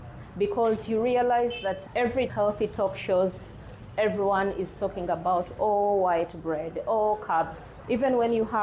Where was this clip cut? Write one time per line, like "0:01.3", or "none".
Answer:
0:02.3
0:07.6